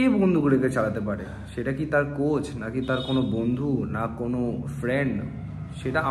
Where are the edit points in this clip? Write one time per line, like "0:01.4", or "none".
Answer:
none